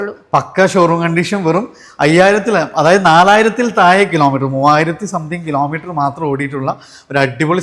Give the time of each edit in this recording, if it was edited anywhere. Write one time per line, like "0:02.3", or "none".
none